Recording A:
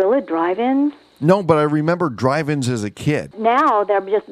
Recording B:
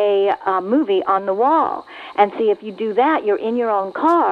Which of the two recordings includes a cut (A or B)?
A